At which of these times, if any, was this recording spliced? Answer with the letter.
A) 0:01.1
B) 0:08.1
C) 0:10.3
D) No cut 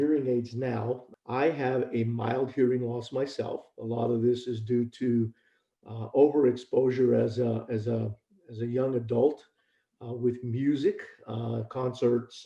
A